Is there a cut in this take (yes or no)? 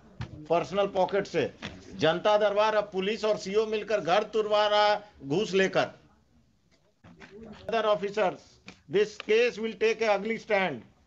yes